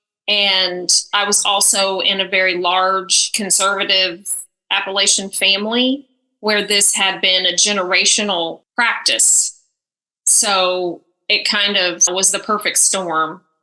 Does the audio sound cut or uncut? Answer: cut